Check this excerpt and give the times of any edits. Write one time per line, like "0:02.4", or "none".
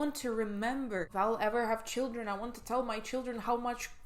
0:01.1